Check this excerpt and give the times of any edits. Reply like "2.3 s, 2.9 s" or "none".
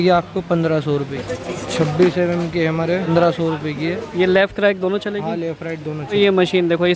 1.1 s, 3.1 s, 6.1 s